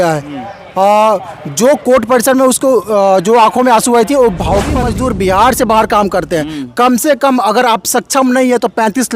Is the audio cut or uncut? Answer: cut